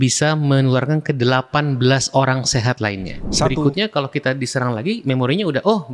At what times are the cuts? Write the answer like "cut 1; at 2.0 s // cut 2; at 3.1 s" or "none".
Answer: cut 1; at 3.5 s